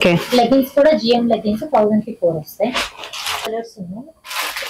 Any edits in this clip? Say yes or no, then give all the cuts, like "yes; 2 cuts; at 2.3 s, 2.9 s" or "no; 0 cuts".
yes; 1 cut; at 3.5 s